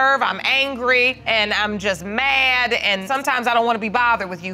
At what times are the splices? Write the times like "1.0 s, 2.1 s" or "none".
1.2 s, 3.0 s